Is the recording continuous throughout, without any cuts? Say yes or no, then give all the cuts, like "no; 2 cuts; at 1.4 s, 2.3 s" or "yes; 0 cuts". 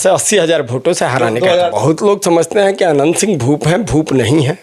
no; 1 cut; at 1.7 s